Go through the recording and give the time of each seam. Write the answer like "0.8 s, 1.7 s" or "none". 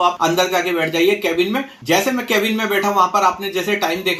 none